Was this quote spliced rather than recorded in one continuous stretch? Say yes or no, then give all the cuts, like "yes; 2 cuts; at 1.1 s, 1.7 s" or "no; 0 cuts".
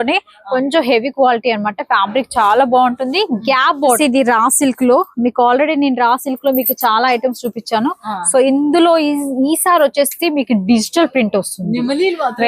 yes; 1 cut; at 4.0 s